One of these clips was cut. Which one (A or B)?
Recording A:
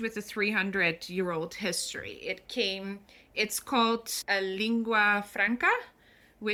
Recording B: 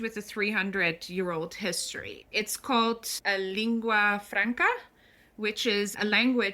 B